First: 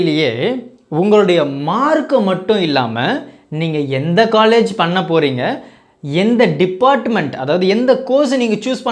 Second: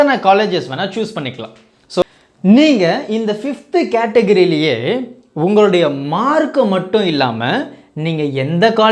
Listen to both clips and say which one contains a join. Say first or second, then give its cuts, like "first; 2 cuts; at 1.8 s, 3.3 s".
second; 1 cut; at 2.0 s